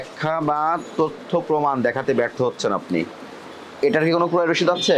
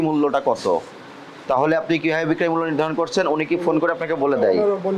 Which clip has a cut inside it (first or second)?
first